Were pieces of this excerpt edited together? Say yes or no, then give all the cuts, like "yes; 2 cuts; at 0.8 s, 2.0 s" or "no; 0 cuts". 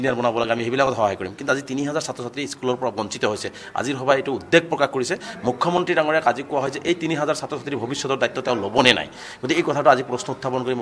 no; 0 cuts